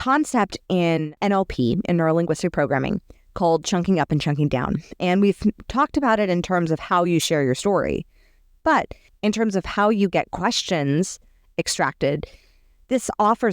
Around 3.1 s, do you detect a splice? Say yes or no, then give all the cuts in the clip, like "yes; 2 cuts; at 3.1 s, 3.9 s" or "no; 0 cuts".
no; 2 cuts; at 1.1 s, 9.0 s